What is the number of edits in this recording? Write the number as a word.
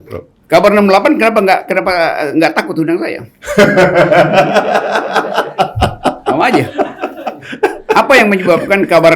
zero